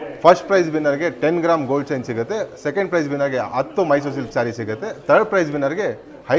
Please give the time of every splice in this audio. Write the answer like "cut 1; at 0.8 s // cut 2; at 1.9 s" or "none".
none